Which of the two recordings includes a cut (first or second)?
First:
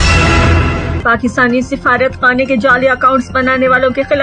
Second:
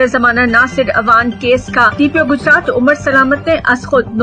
first